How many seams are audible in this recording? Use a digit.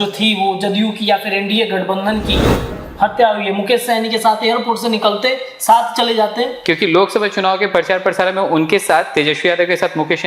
1